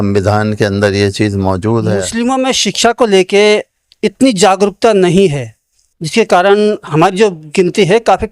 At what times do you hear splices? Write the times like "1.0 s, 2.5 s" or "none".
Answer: 2.1 s, 6.8 s